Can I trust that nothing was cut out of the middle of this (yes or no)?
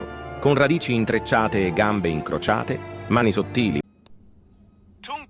no